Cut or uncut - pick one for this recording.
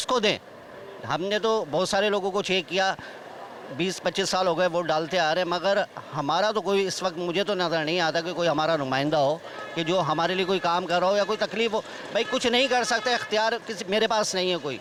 uncut